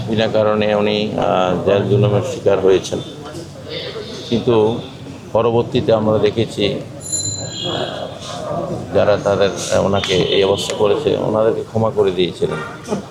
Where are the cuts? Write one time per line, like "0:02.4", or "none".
none